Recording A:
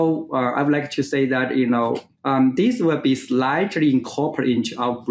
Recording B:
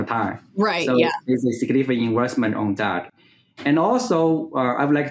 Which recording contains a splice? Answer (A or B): A